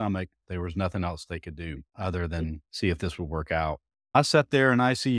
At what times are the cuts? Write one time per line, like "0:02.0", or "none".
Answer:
0:01.9
0:02.6
0:04.1